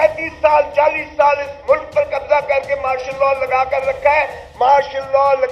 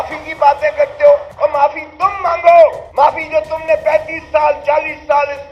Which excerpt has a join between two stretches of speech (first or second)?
second